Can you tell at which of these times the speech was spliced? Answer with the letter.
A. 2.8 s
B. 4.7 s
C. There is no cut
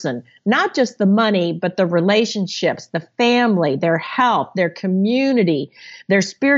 C